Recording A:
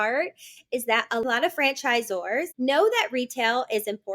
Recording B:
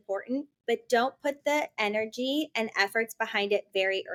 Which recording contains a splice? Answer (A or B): A